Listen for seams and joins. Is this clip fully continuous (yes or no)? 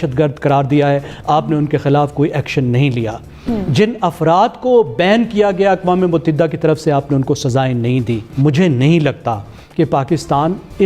no